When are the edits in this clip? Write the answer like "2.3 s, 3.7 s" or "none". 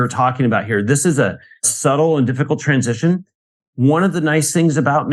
1.7 s